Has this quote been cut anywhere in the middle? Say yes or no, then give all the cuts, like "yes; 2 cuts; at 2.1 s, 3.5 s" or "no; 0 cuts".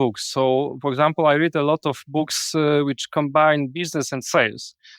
no; 0 cuts